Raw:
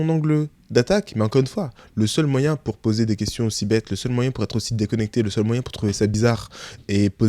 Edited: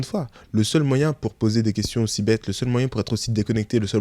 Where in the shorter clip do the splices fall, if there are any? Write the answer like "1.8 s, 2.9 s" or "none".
none